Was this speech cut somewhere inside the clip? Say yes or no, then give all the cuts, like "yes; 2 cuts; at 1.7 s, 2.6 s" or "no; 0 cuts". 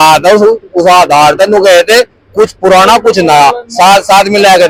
no; 0 cuts